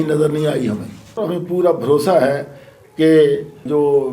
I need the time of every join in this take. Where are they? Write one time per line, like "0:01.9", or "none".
0:01.2